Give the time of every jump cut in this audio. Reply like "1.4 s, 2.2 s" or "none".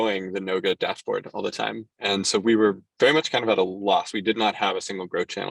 1.9 s

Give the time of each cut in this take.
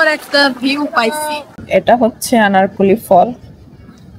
1.6 s

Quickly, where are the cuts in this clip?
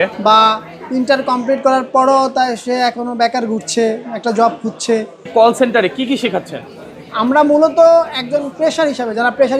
5.3 s

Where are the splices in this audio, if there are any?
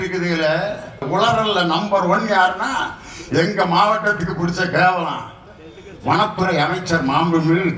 1.1 s

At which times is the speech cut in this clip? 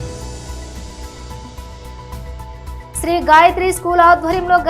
2.7 s

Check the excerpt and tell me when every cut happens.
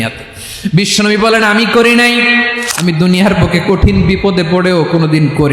2.6 s

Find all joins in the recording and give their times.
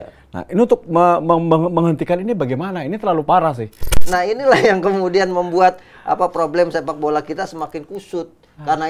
4.0 s

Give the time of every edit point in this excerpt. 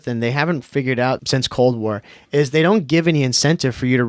1.2 s

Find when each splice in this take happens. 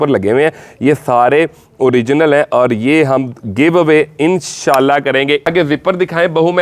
5.5 s

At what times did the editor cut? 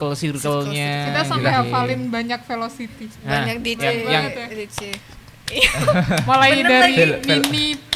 none

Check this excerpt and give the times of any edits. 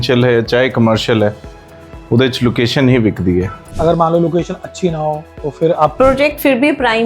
3.6 s, 5.9 s

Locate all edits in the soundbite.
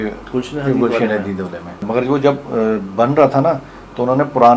none

